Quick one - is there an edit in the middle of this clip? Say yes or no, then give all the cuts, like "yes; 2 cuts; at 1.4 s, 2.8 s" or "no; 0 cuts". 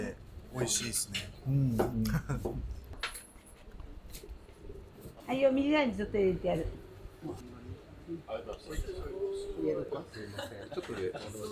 yes; 3 cuts; at 2.8 s, 5.2 s, 7.4 s